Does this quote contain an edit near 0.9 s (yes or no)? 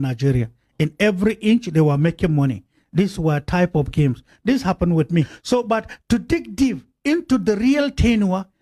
no